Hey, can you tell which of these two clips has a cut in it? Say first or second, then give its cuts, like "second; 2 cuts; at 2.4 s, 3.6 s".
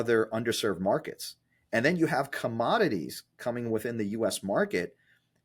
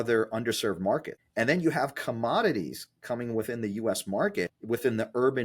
second; 2 cuts; at 1.2 s, 4.6 s